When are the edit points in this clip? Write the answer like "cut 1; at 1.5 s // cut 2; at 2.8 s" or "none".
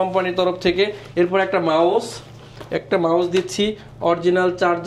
none